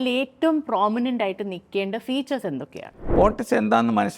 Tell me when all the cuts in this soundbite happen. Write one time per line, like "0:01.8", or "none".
0:03.0